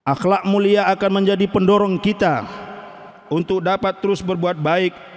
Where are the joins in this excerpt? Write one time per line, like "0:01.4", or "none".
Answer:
none